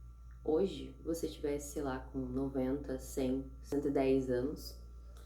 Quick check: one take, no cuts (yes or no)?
no